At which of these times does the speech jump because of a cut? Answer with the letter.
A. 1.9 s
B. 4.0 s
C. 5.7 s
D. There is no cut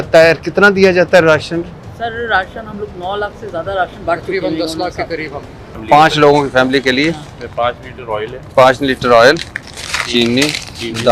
C